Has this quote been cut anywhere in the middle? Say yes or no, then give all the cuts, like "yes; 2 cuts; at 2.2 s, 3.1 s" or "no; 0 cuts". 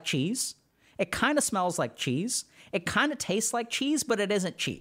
no; 0 cuts